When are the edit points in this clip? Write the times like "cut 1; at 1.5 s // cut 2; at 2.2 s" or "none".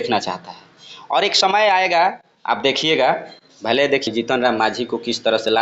cut 1; at 4.1 s

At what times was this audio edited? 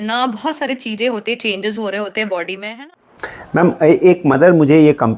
cut 1; at 2.7 s

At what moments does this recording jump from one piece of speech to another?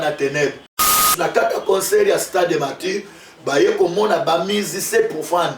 cut 1; at 0.9 s

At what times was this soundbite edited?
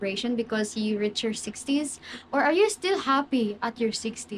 none

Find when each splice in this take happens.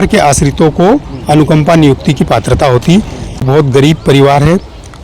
cut 1; at 3.5 s

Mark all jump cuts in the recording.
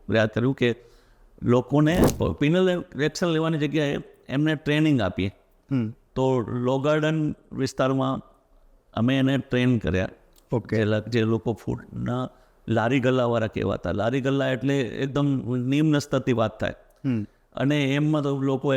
cut 1; at 2.1 s

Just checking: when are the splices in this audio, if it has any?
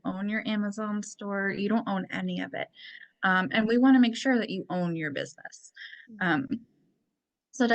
none

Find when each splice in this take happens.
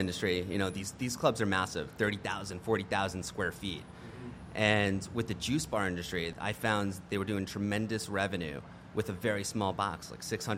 cut 1; at 6.3 s

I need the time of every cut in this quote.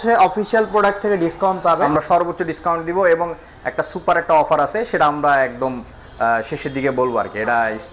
cut 1; at 1.8 s

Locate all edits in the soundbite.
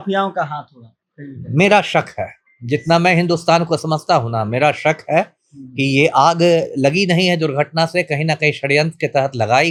none

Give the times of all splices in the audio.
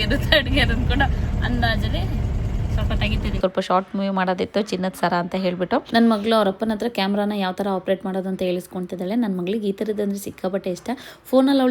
cut 1; at 3.4 s // cut 2; at 5.9 s

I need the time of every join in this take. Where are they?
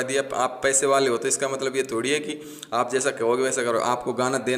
none

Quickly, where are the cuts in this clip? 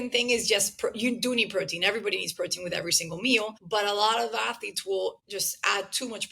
cut 1; at 3.6 s // cut 2; at 5.2 s

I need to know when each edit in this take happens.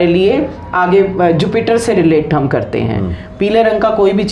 none

